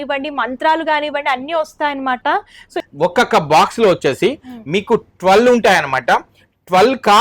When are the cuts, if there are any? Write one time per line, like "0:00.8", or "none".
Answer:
0:02.7